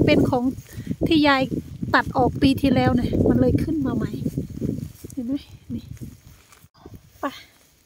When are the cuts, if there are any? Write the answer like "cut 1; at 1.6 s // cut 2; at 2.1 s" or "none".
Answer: cut 1; at 6.8 s

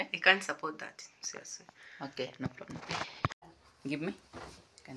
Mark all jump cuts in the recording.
cut 1; at 3.5 s

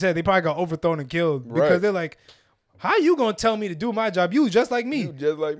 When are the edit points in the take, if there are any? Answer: none

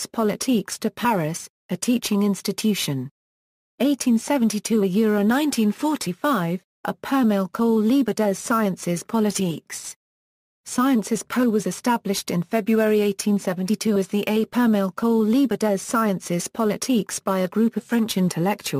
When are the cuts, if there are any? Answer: cut 1; at 3.4 s

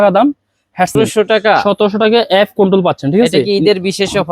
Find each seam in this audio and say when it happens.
cut 1; at 1.0 s

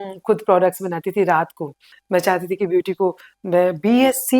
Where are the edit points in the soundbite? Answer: cut 1; at 1.9 s

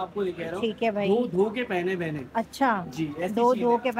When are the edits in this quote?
none

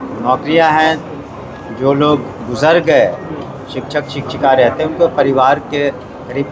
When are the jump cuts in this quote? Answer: none

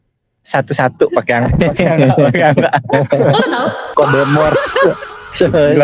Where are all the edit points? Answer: none

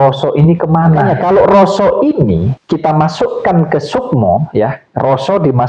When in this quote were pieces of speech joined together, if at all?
cut 1; at 1.1 s // cut 2; at 2.5 s

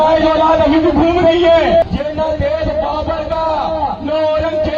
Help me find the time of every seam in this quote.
cut 1; at 1.8 s

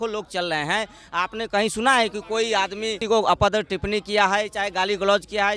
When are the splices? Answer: cut 1; at 3.0 s

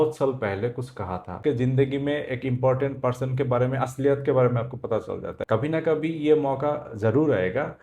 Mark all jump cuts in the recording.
cut 1; at 1.4 s // cut 2; at 5.3 s

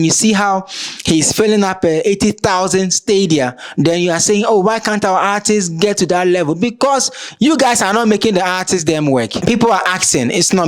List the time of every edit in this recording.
cut 1; at 9.4 s

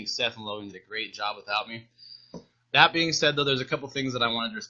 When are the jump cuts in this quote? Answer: cut 1; at 3.4 s

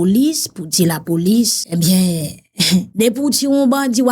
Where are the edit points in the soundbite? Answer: cut 1; at 1.6 s // cut 2; at 2.9 s

